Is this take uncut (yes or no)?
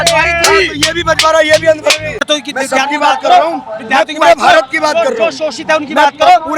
no